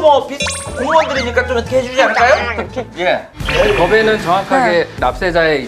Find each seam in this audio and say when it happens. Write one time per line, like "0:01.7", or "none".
0:03.4